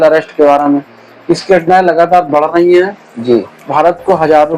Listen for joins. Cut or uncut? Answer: uncut